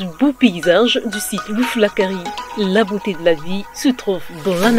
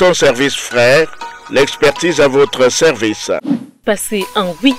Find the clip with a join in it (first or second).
second